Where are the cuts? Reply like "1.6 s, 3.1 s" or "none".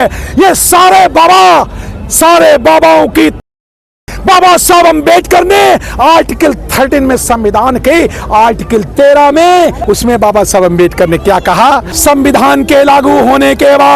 11.9 s